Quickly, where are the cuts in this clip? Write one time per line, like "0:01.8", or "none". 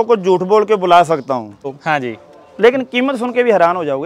0:01.7